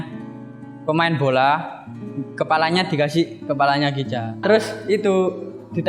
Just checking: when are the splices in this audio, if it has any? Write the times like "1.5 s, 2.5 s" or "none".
4.4 s